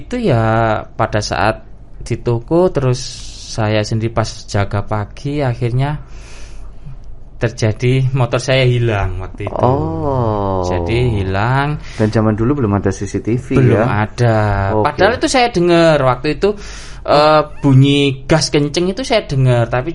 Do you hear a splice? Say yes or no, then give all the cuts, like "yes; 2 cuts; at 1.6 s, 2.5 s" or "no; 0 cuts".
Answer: no; 0 cuts